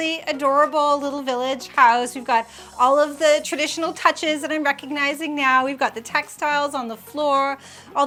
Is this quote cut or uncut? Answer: uncut